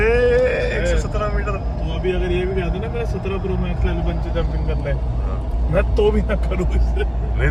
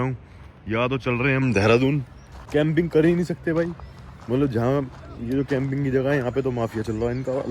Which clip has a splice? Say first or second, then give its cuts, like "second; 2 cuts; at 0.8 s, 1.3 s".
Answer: second; 1 cut; at 2.5 s